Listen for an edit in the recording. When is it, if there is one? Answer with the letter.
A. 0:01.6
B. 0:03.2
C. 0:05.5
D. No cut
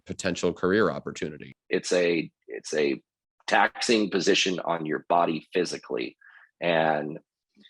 A